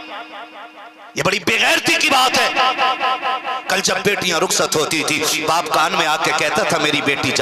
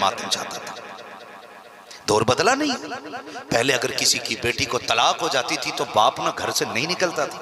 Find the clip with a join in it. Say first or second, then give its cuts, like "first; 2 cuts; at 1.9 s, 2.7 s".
first; 1 cut; at 1.0 s